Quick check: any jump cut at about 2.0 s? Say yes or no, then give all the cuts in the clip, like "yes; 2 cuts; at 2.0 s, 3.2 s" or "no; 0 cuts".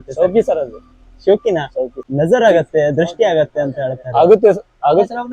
yes; 1 cut; at 2.0 s